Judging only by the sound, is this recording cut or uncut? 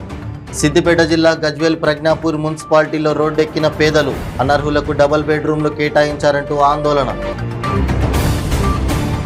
uncut